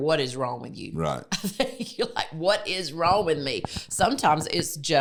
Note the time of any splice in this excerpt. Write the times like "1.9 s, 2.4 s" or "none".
none